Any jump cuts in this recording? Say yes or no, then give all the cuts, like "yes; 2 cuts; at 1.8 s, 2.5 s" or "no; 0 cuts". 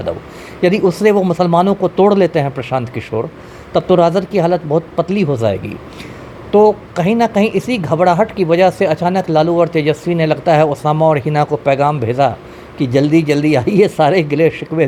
no; 0 cuts